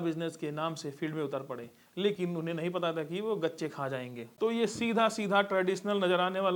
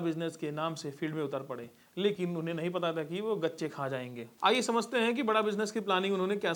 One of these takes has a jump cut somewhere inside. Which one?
first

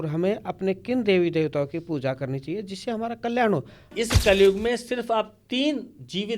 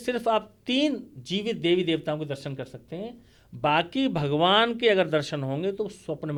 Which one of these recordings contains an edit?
first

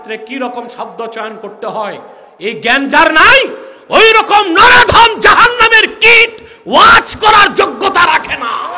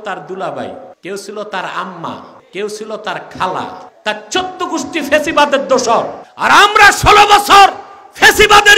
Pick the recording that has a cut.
second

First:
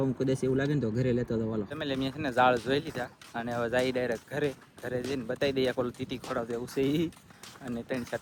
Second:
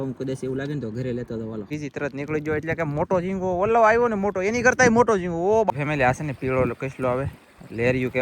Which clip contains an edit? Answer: second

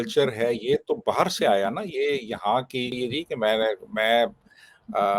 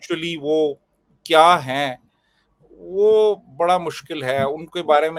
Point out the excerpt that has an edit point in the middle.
first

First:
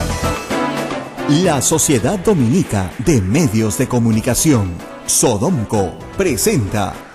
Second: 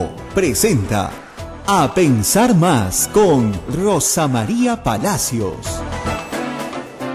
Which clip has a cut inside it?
first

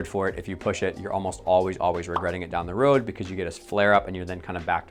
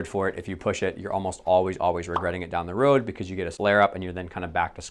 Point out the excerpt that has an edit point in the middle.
second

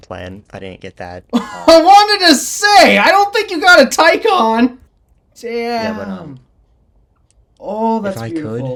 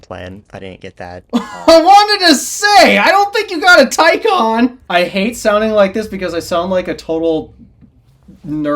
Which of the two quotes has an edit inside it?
second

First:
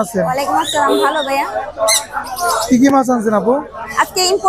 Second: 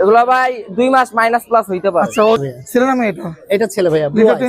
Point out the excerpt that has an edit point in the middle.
second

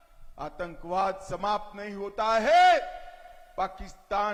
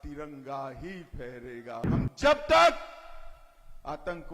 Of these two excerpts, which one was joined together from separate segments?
second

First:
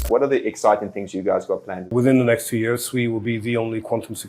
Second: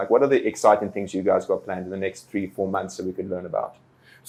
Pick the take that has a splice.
first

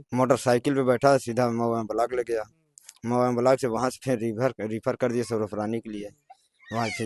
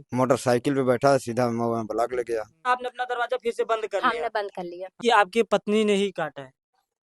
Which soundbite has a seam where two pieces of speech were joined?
second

